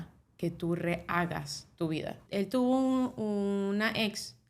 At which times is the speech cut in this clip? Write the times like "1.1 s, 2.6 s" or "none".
2.2 s